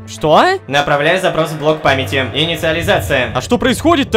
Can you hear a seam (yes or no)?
no